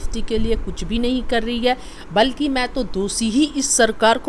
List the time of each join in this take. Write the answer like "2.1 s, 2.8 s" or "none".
none